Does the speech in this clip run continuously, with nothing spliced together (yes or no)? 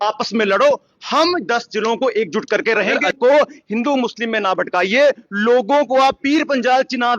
no